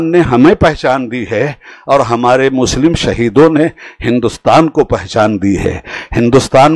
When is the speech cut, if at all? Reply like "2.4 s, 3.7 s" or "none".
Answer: none

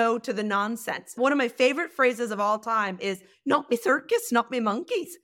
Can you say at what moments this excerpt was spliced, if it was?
1.1 s

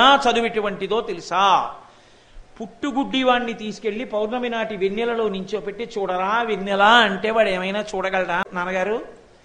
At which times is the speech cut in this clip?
8.5 s

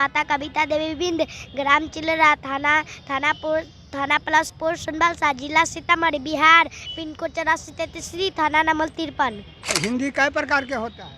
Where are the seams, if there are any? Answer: 9.6 s

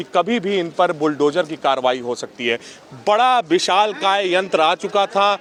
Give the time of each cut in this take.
none

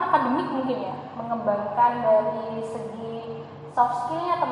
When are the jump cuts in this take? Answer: none

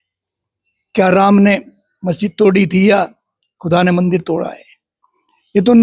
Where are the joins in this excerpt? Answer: none

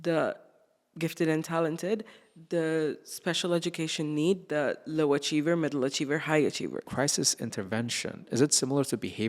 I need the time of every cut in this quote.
6.8 s

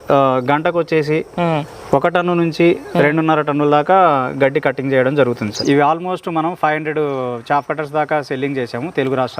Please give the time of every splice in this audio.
5.5 s

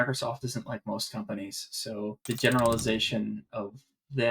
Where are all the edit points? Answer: 2.2 s

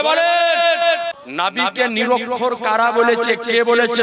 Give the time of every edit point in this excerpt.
1.2 s

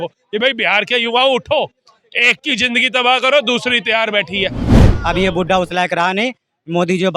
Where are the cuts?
4.8 s

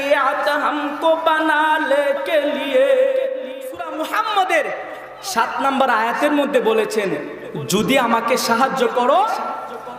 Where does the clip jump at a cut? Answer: 4.0 s

